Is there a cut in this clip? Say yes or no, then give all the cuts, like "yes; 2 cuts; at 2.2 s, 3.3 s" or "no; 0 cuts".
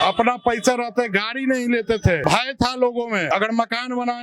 yes; 2 cuts; at 2.2 s, 3.3 s